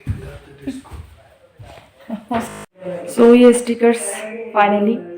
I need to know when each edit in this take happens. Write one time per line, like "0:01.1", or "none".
0:02.7

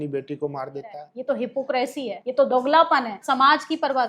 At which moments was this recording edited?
0:01.1
0:02.2
0:03.2

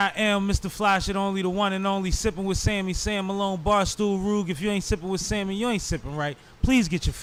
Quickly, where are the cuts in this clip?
none

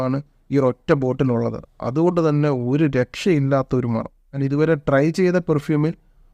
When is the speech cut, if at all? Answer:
0:04.4

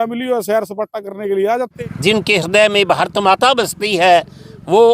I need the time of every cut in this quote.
0:01.8

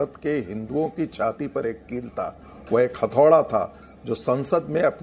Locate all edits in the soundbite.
none

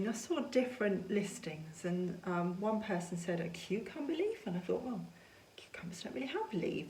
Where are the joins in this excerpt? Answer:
none

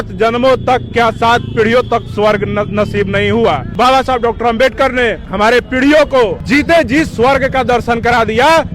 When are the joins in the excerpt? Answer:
0:03.7
0:05.2
0:06.4

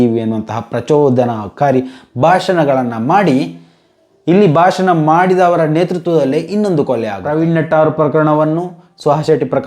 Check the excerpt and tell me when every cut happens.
0:07.2

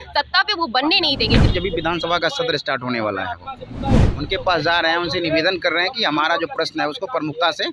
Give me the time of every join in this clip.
0:01.5
0:04.1

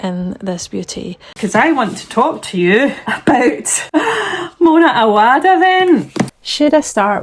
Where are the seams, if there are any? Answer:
0:01.3
0:03.1
0:03.7
0:06.2

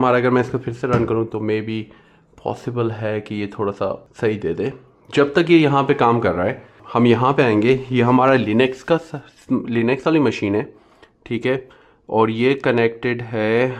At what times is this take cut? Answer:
0:04.1
0:06.8

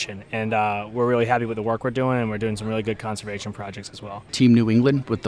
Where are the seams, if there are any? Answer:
0:04.2

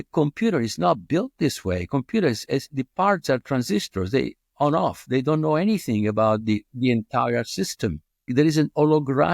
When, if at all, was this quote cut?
0:08.3

